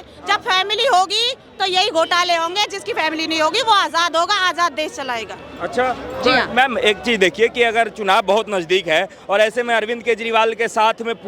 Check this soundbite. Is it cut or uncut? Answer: uncut